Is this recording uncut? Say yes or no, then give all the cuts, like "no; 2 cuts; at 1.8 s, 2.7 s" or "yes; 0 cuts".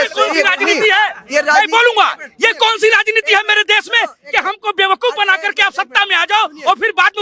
yes; 0 cuts